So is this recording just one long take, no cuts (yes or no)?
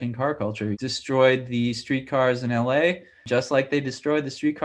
no